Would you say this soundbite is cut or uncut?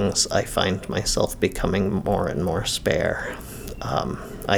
uncut